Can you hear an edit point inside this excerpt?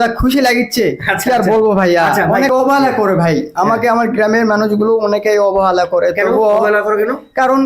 yes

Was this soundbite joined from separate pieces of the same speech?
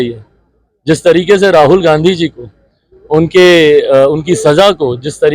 no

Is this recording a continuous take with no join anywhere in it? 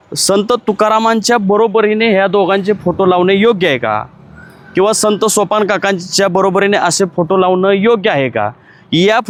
yes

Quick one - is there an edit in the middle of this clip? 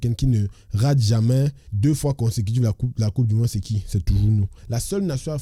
yes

